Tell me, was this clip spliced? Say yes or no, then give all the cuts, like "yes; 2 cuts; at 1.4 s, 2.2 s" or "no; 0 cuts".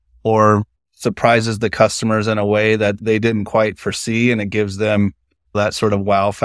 yes; 2 cuts; at 3.0 s, 5.5 s